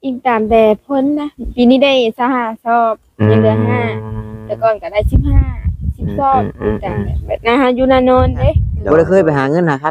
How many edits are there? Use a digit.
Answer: 1